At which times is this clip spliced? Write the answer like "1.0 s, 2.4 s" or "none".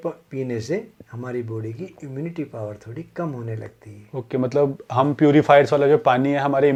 none